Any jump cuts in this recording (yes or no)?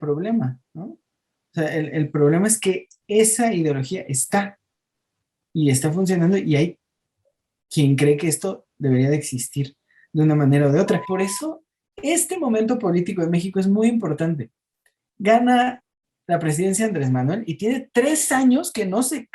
yes